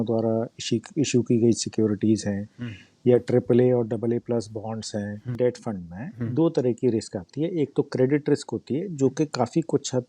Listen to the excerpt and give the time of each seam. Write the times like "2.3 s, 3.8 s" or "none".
5.3 s

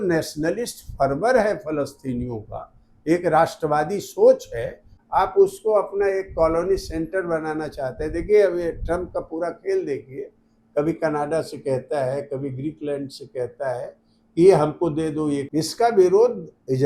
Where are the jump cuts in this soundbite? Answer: 4.9 s, 15.5 s

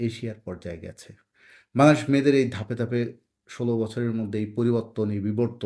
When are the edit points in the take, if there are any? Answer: none

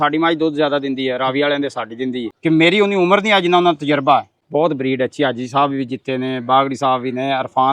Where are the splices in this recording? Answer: 2.3 s, 4.4 s

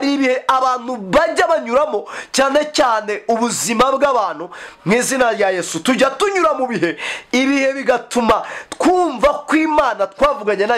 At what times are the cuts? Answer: none

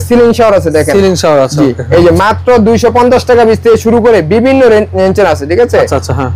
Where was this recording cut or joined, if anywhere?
none

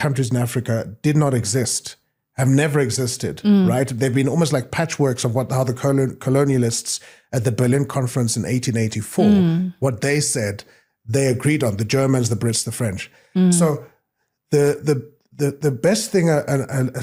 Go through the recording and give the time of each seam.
none

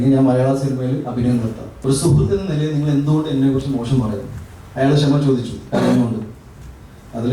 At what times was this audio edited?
1.7 s

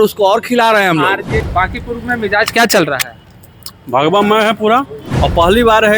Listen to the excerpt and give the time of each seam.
1.5 s, 5.0 s

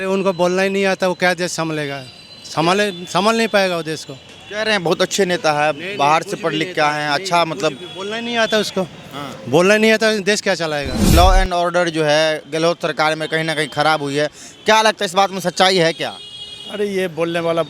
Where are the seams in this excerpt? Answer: 11.1 s

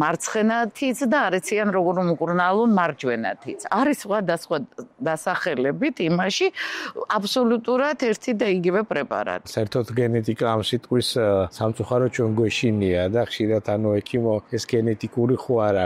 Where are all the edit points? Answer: 3.6 s, 9.5 s, 11.5 s, 14.5 s

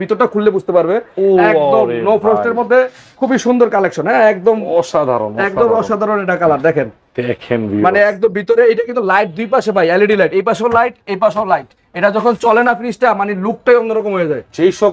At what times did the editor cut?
none

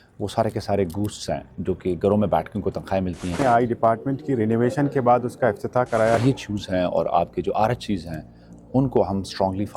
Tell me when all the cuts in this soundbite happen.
3.4 s, 6.2 s

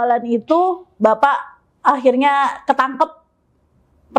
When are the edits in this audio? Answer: none

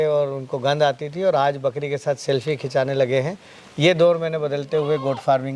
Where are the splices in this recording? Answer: none

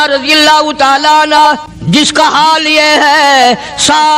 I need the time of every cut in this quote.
1.7 s

